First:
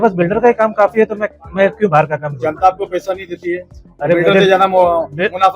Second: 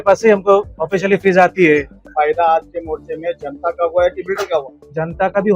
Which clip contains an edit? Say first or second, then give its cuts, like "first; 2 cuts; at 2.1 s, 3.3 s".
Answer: second; 1 cut; at 2.0 s